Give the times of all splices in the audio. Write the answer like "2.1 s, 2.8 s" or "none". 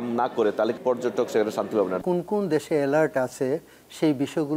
0.8 s, 2.0 s